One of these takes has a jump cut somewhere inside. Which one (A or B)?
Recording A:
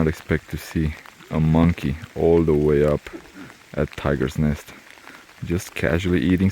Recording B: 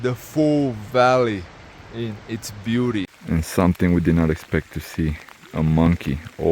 B